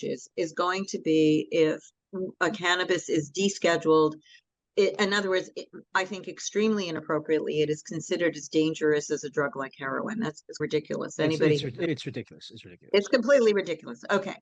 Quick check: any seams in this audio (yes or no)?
no